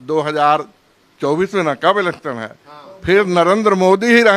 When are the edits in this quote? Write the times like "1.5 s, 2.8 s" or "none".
none